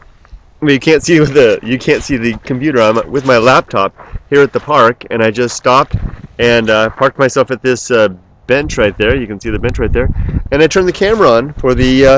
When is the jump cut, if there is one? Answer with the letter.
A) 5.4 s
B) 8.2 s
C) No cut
C